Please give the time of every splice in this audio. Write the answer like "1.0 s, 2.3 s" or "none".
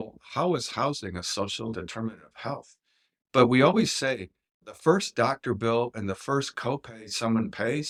none